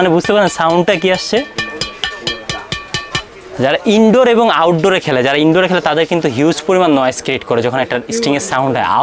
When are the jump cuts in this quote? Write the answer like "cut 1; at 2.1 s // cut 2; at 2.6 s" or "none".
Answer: none